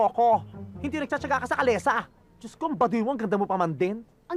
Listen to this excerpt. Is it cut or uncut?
uncut